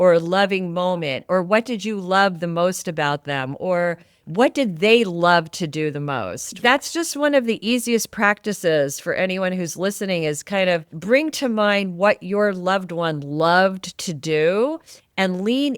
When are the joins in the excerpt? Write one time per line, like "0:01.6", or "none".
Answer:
0:06.6
0:10.9